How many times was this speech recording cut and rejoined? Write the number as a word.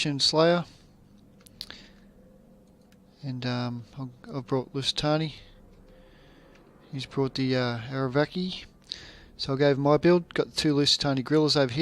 one